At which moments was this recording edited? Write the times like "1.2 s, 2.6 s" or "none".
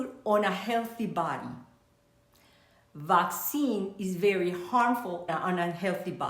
5.3 s